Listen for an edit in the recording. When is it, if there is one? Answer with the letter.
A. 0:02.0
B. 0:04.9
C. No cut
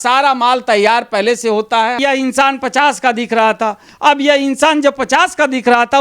A